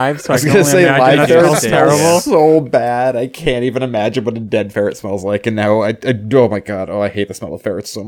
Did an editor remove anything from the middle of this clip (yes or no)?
no